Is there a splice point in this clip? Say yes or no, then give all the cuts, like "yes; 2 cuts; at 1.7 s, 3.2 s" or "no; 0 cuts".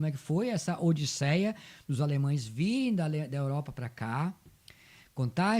no; 0 cuts